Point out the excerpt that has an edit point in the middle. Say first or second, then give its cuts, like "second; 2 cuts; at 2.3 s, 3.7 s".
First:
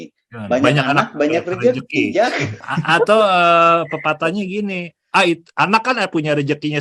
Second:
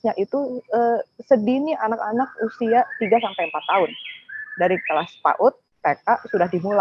first; 1 cut; at 2.5 s